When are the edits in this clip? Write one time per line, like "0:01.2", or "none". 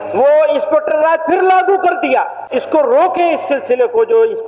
0:02.4